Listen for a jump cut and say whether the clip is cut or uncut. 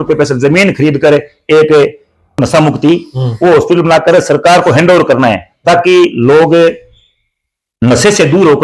cut